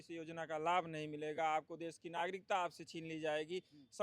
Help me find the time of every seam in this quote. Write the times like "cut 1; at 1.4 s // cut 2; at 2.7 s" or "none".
none